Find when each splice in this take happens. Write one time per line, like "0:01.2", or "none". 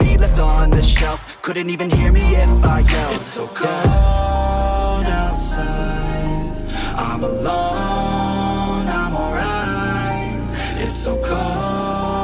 0:04.4

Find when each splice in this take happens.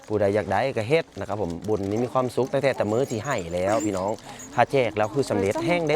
none

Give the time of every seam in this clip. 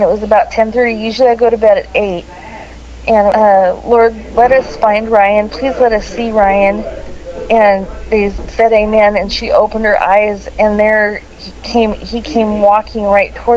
0:03.3

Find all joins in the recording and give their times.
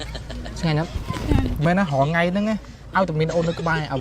0:01.6

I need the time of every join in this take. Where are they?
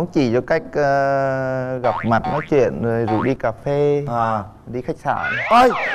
none

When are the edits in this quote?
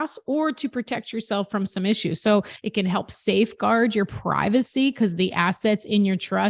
0:02.6

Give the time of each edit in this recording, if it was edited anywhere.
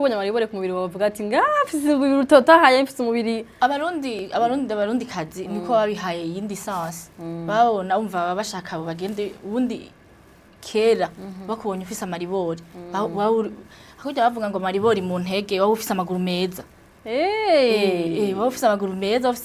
none

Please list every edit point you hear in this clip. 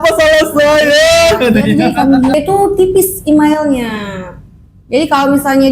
0:02.3

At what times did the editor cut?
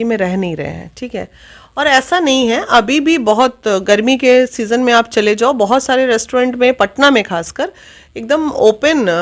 none

